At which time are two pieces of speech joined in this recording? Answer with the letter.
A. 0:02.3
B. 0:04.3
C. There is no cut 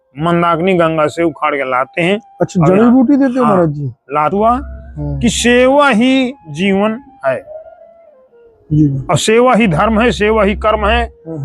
B